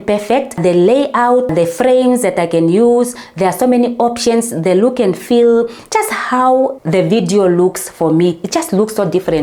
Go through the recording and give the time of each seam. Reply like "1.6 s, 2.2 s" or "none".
none